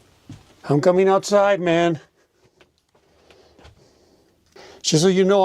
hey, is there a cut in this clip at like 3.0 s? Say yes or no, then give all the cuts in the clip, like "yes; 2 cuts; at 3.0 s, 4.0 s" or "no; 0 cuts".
no; 1 cut; at 4.6 s